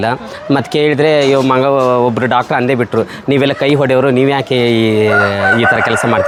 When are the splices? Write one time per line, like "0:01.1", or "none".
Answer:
none